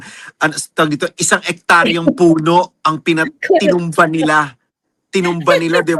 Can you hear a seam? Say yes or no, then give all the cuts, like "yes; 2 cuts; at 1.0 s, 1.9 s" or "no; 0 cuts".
no; 0 cuts